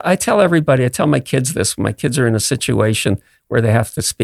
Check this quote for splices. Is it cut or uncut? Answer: uncut